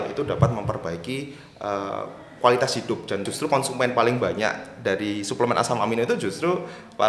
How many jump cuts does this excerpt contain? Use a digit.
1